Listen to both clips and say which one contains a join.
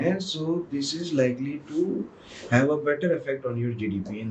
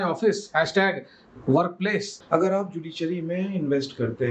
second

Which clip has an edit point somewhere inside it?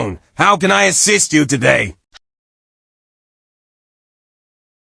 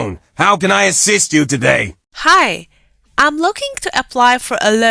second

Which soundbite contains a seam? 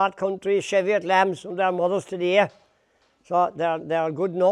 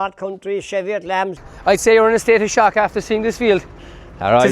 second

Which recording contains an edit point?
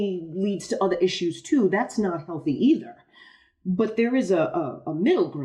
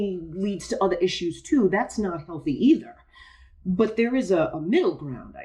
second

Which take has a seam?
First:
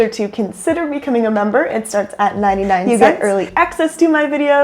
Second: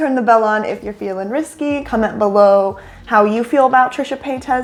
first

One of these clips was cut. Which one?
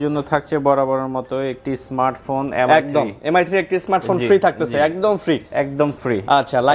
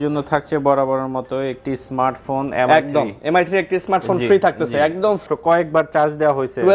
second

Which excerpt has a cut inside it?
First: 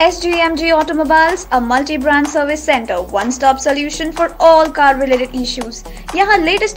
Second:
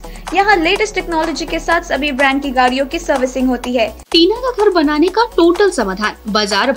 second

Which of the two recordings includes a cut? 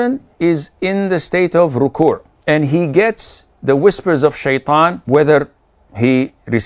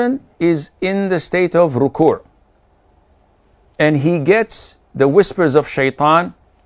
first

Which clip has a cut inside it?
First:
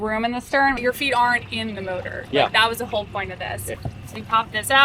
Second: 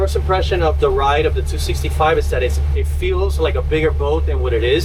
first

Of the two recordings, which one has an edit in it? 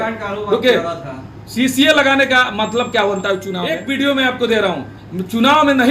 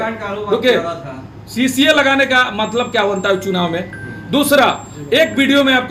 first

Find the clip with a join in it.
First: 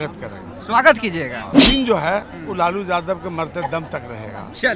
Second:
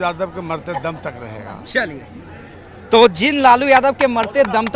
first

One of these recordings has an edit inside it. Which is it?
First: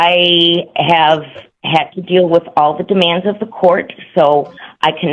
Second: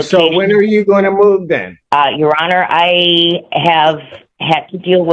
second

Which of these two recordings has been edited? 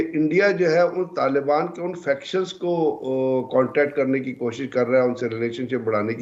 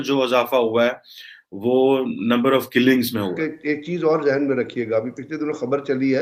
second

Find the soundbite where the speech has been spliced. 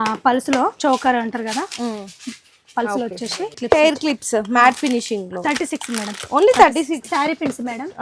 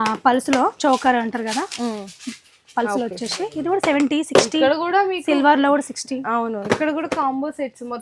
first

